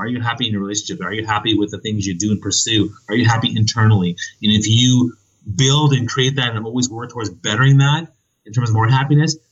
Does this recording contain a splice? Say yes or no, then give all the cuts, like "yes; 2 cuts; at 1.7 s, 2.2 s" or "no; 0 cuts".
no; 0 cuts